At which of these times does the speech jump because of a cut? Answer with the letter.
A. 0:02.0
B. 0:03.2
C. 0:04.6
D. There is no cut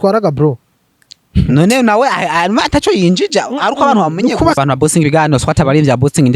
C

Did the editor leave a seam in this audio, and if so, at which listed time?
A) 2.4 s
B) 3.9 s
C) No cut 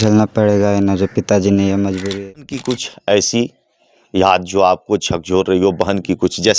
A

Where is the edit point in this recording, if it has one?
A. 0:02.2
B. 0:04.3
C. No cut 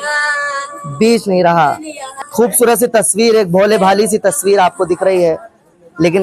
A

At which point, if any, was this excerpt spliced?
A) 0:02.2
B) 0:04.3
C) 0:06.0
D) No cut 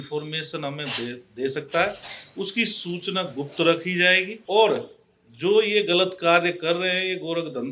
B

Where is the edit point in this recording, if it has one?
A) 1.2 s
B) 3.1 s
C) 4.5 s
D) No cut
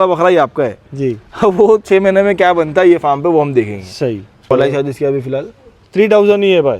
C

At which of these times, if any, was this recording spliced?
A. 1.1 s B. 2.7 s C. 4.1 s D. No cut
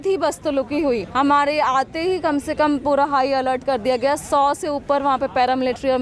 A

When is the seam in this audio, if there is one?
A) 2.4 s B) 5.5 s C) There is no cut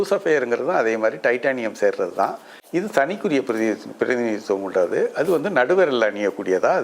C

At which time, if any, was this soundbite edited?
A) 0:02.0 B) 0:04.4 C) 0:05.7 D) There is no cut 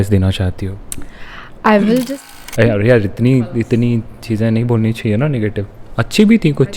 A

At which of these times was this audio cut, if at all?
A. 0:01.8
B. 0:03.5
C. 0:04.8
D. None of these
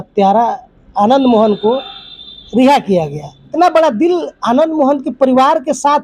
B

